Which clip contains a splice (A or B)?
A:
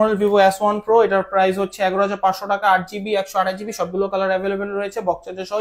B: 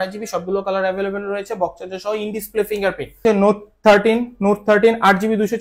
B